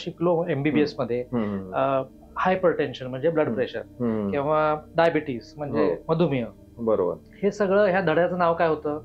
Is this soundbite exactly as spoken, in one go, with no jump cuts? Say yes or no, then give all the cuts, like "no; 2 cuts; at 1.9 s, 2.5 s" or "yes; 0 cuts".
yes; 0 cuts